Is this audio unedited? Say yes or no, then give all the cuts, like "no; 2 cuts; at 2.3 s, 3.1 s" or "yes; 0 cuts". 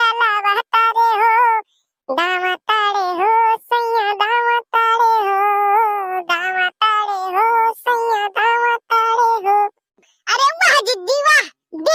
yes; 0 cuts